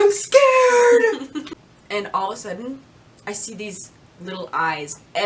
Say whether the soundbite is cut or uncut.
cut